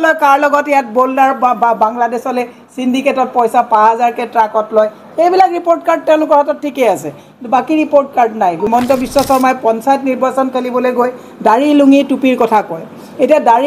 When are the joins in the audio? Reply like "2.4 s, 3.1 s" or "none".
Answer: 8.7 s